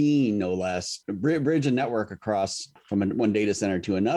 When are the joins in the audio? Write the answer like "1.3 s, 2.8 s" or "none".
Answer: 1.0 s, 2.7 s